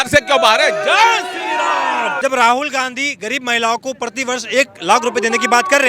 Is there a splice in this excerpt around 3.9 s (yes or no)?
no